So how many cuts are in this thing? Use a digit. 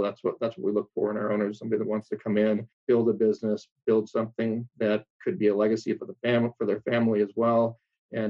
2